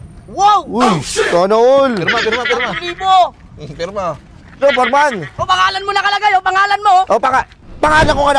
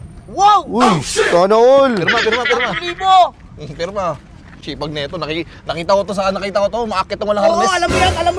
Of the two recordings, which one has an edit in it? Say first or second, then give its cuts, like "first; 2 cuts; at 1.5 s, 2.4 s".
first; 1 cut; at 4.6 s